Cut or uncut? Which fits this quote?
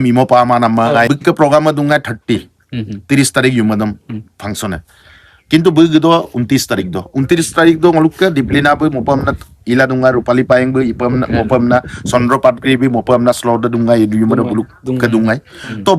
cut